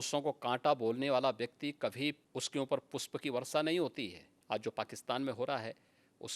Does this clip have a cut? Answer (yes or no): yes